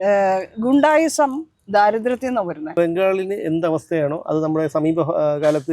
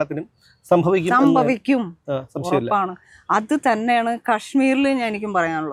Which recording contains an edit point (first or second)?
first